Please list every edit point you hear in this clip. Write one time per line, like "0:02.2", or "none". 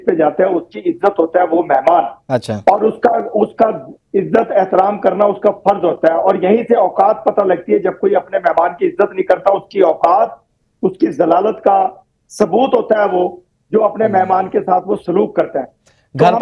none